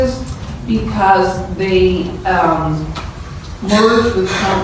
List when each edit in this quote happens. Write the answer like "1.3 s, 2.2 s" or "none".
none